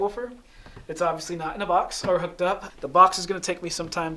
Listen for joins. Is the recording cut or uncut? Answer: cut